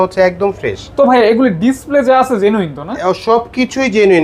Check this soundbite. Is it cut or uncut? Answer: uncut